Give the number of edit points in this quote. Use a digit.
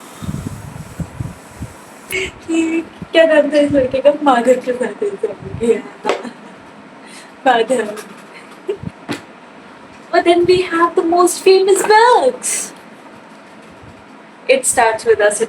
2